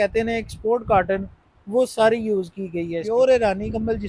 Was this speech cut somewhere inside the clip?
yes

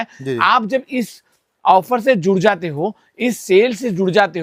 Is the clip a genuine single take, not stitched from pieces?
yes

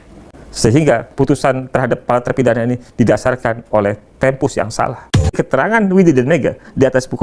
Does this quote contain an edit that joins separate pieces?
no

